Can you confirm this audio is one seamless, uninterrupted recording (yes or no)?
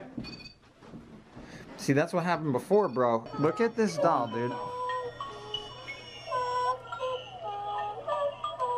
no